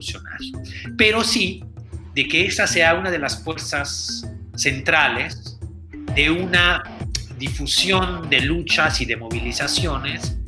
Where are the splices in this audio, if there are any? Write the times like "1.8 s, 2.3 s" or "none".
none

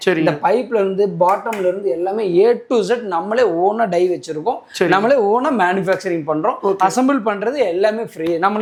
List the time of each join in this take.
none

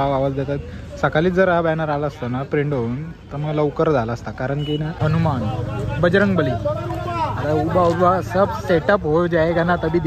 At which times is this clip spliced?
4.9 s

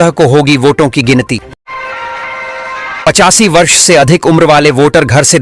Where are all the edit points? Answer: 1.6 s, 3.1 s

